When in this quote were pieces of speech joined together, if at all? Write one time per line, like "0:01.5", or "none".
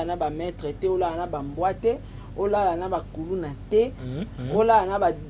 none